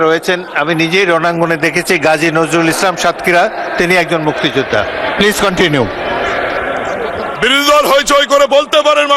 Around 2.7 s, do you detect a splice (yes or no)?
no